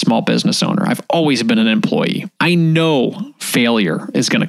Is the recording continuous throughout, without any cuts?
no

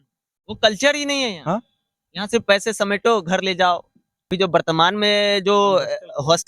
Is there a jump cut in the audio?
yes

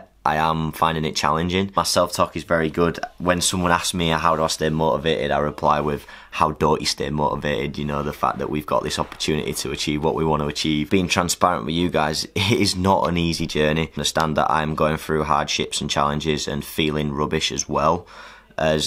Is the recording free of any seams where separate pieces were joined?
yes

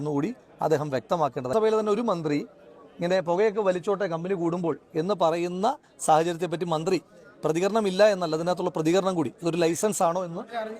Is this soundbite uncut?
no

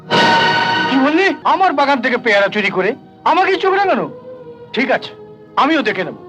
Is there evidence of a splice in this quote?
yes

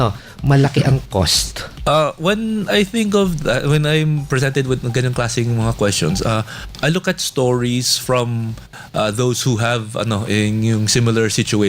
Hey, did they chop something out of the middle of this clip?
yes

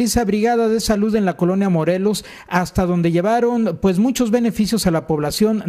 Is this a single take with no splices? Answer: yes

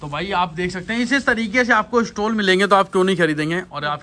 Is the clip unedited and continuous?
yes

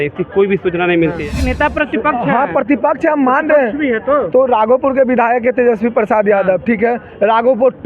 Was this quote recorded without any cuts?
no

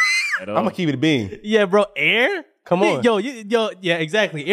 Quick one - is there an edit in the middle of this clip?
no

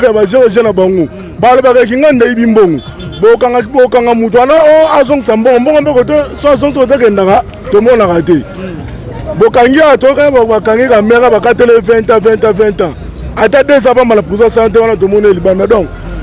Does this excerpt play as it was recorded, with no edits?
yes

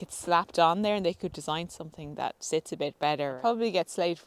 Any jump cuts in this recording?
yes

